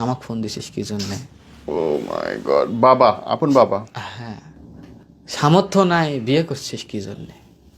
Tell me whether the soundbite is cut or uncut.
uncut